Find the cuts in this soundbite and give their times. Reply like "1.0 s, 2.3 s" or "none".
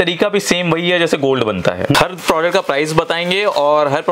1.9 s